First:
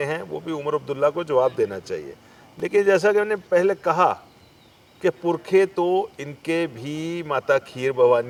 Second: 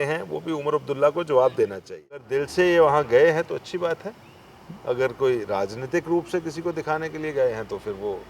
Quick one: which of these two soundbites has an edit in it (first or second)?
second